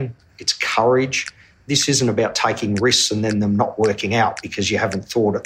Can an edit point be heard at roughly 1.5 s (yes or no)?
yes